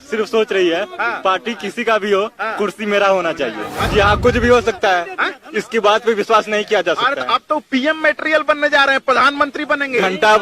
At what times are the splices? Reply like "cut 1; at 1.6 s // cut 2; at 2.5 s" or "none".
cut 1; at 3.7 s